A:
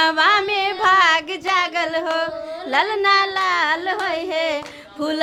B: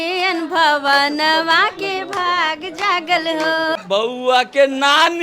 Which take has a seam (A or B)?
B